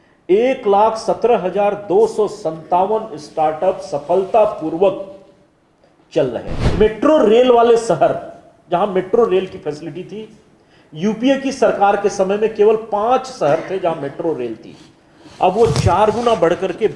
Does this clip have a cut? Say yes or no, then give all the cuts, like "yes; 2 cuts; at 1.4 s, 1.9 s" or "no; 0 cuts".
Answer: yes; 1 cut; at 6.6 s